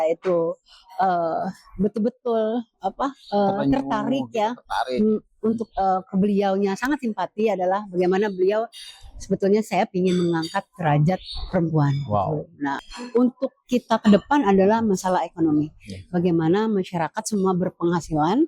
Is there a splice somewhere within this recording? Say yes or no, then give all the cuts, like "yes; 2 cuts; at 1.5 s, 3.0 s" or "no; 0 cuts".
yes; 1 cut; at 12.9 s